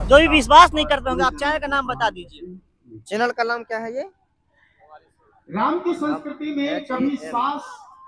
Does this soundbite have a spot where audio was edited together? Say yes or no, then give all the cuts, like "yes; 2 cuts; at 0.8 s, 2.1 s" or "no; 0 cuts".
no; 0 cuts